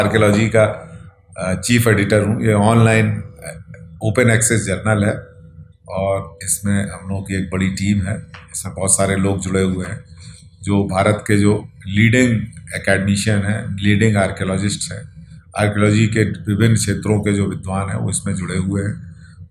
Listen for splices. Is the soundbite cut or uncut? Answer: uncut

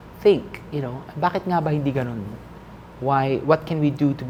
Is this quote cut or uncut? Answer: uncut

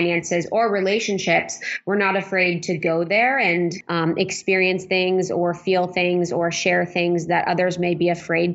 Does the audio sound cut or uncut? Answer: cut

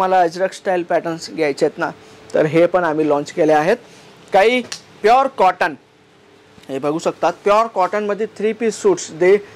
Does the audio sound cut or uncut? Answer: uncut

